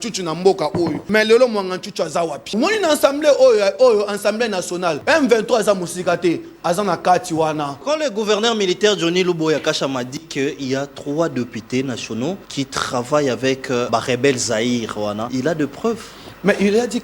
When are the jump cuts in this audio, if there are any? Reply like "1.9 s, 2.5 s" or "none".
1.0 s, 2.5 s, 5.0 s, 7.8 s, 12.5 s, 13.9 s, 15.3 s